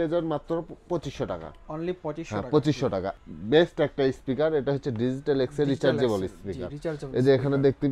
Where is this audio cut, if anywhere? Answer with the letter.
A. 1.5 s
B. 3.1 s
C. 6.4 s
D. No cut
B